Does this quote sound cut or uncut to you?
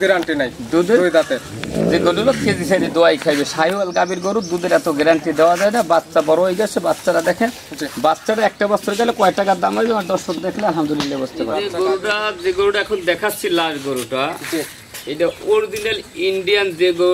cut